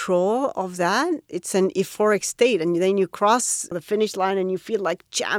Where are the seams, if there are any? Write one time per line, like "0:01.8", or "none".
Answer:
0:01.3
0:03.8